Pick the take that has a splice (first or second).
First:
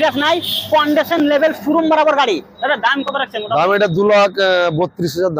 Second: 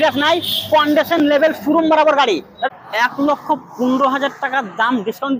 second